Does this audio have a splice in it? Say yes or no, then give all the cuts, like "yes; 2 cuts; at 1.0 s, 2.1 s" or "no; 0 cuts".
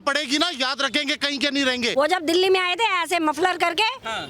yes; 1 cut; at 1.9 s